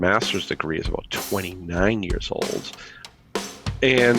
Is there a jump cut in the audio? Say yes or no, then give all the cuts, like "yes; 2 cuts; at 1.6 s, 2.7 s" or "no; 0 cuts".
yes; 1 cut; at 3.1 s